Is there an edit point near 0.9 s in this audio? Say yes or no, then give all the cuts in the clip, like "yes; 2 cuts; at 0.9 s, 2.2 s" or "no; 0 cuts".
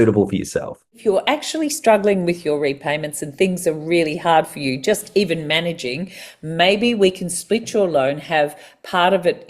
yes; 1 cut; at 0.9 s